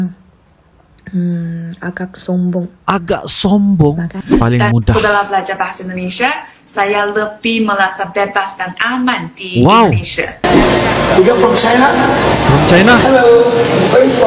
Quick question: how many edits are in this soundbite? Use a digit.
2